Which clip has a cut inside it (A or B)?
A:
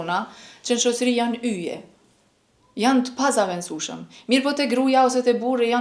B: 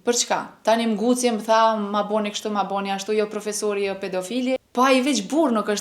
B